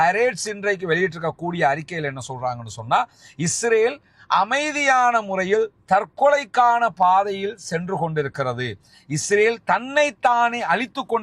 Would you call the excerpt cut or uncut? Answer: uncut